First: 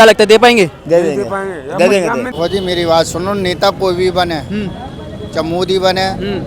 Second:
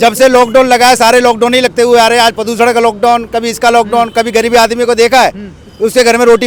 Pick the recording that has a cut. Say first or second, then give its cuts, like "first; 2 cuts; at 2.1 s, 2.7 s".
first; 1 cut; at 2.3 s